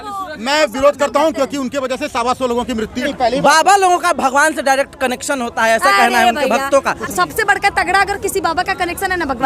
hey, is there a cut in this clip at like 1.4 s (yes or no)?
no